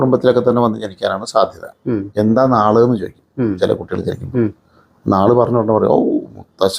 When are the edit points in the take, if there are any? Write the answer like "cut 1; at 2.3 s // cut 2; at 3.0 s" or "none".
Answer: cut 1; at 2.1 s